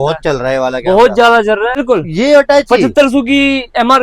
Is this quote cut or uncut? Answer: cut